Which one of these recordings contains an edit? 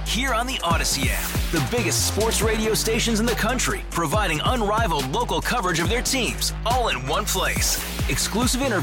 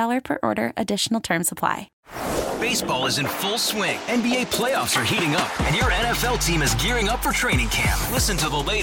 second; 1 cut; at 1.9 s

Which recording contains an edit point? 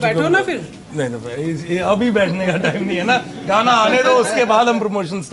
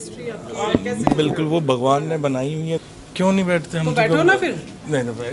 second; 1 cut; at 2.8 s

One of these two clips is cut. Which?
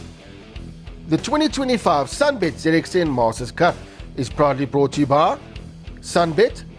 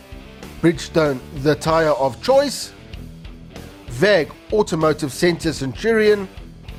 first; 1 cut; at 1.1 s

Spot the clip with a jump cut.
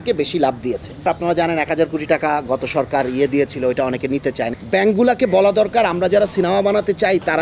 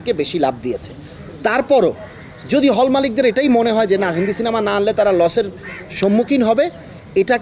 first; 2 cuts; at 1.1 s, 4.6 s

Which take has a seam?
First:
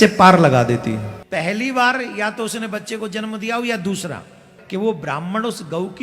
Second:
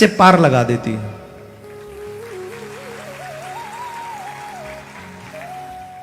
first; 2 cuts; at 1.2 s, 4.5 s

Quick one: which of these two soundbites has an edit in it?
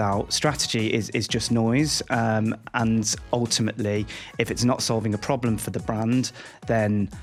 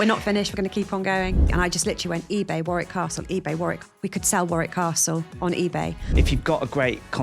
second; 2 cuts; at 1.4 s, 6.0 s

